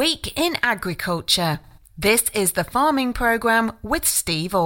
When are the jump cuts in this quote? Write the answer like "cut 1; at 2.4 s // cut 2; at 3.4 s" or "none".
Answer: none

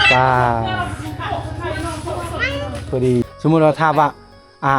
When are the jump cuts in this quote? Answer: cut 1; at 3.2 s

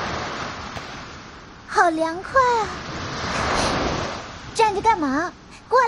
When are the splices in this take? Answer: cut 1; at 1.0 s

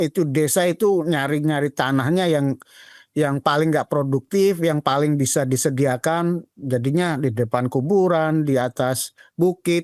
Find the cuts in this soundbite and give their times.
none

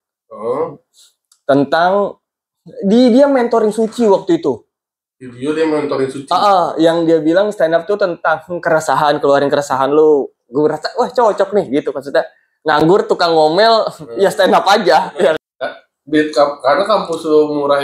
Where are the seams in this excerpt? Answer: cut 1; at 15.4 s

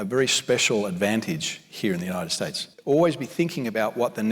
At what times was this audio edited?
cut 1; at 2.7 s

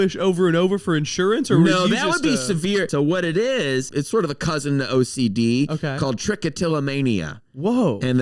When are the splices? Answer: cut 1; at 2.9 s // cut 2; at 3.9 s

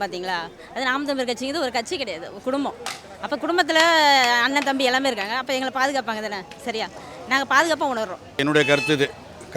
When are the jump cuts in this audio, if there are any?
cut 1; at 8.4 s

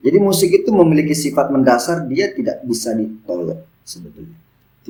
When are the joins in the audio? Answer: none

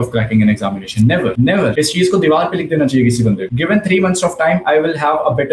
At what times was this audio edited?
cut 1; at 1.5 s // cut 2; at 3.5 s

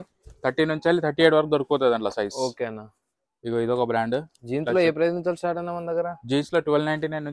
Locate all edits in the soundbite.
none

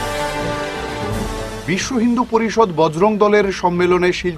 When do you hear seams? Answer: cut 1; at 1.1 s

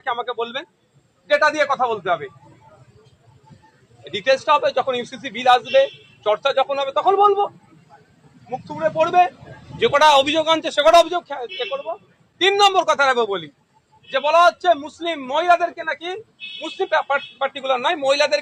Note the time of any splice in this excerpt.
none

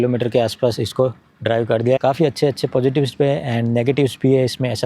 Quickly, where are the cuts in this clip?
cut 1; at 2.0 s

